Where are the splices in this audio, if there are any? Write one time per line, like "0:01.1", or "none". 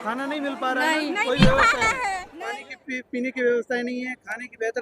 0:02.3